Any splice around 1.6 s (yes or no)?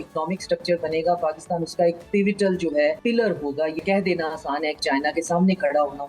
no